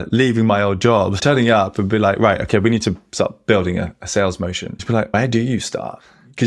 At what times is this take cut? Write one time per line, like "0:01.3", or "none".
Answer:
0:01.2
0:05.1